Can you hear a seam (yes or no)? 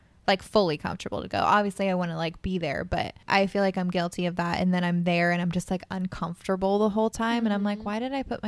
yes